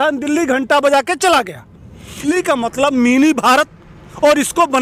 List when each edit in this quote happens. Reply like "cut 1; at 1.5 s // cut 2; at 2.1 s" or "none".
cut 1; at 2.3 s